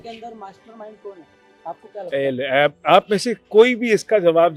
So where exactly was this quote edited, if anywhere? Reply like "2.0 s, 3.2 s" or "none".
none